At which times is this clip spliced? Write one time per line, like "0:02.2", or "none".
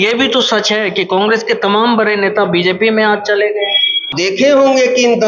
0:04.1